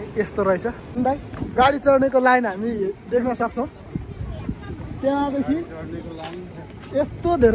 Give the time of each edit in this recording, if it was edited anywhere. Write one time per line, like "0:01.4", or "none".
0:01.0

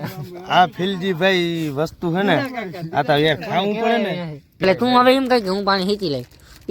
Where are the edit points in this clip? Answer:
0:04.6

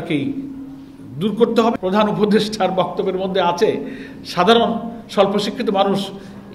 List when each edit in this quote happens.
0:01.8

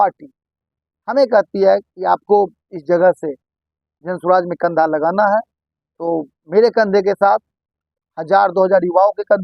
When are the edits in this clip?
none

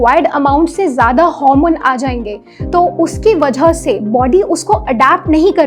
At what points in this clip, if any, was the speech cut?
none

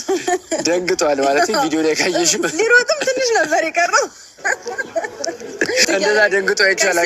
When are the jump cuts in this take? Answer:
0:05.9

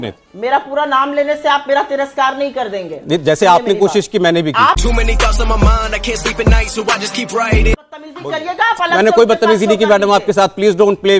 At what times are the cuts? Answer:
0:07.8

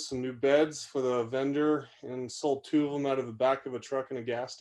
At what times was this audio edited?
none

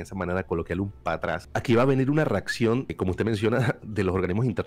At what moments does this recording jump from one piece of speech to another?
0:01.4
0:02.9

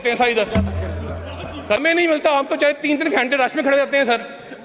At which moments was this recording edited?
0:01.8

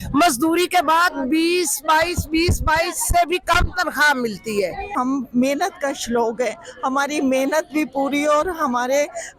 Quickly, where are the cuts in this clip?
0:04.9

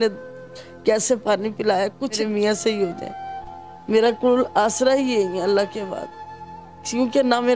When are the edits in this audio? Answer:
0:02.2

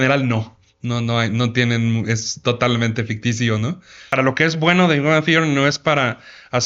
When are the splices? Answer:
0:04.1

